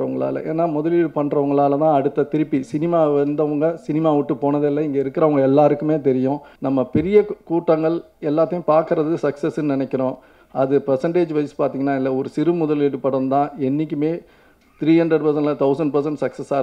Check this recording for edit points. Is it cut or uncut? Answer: cut